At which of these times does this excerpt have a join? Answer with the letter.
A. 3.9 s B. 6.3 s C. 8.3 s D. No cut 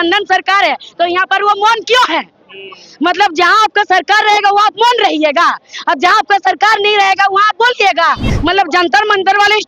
C